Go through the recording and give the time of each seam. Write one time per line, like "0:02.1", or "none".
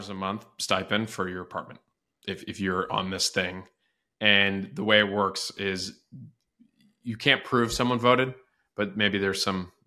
none